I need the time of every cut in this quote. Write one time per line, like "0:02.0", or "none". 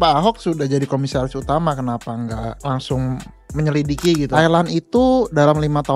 0:04.3

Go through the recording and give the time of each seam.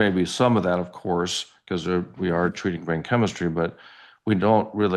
none

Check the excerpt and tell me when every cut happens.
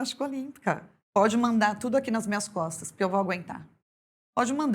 0:00.9

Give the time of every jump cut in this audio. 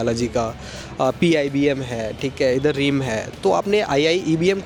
none

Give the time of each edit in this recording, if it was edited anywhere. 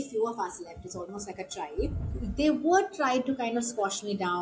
0:02.1

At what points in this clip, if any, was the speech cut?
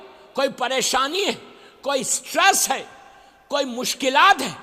none

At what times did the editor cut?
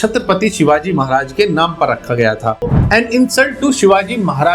0:02.7

